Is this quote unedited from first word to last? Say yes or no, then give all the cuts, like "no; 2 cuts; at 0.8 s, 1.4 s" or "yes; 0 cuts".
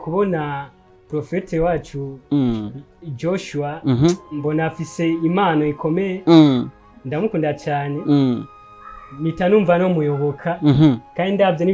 yes; 0 cuts